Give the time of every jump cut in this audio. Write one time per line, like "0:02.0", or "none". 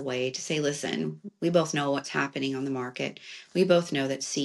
none